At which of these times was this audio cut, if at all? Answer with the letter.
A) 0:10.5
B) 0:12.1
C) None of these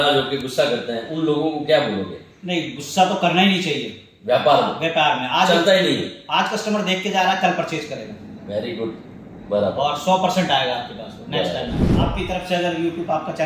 B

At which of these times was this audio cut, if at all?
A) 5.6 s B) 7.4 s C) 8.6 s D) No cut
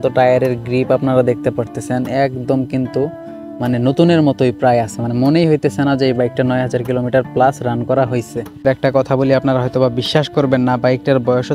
C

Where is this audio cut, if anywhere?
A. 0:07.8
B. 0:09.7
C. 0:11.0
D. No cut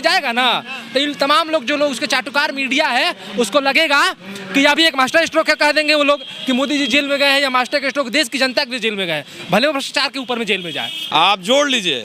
C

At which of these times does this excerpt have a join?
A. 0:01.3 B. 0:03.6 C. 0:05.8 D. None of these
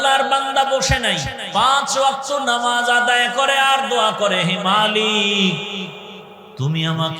A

